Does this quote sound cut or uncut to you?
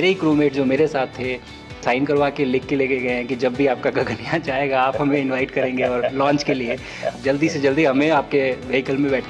cut